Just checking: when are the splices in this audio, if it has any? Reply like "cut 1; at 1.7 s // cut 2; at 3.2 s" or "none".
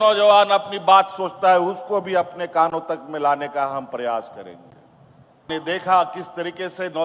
cut 1; at 5.4 s